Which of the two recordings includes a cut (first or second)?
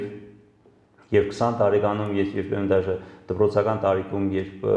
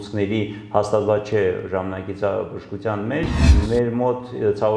second